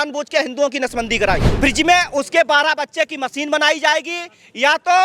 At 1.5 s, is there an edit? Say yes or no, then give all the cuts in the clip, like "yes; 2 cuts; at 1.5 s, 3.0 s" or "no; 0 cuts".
yes; 1 cut; at 1.5 s